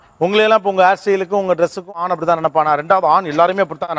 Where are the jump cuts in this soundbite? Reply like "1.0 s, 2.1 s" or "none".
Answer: none